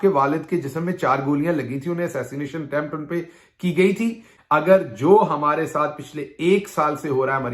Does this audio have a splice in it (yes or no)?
yes